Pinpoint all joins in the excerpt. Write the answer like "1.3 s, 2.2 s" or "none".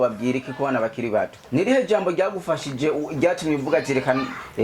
1.4 s